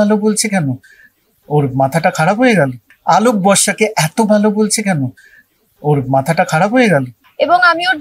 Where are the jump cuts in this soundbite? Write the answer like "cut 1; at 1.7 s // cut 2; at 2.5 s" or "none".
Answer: cut 1; at 2.9 s // cut 2; at 7.2 s